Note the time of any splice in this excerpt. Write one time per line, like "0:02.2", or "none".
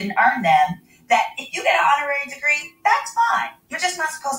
0:01.7